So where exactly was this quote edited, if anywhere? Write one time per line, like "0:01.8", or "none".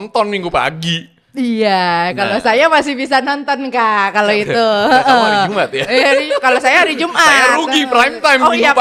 none